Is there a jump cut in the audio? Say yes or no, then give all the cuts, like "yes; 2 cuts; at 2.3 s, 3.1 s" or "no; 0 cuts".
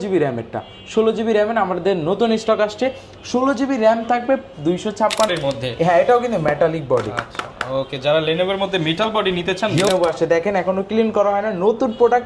yes; 2 cuts; at 5.3 s, 9.9 s